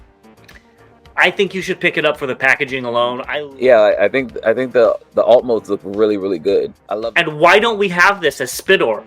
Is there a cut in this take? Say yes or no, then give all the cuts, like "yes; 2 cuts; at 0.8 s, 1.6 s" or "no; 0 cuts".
yes; 2 cuts; at 3.2 s, 6.8 s